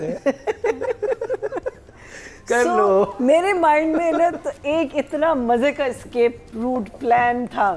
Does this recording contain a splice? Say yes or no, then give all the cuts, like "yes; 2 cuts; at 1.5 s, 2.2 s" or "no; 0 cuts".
no; 0 cuts